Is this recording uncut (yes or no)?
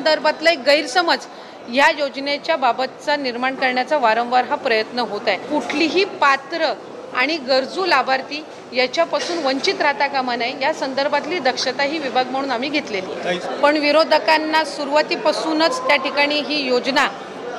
no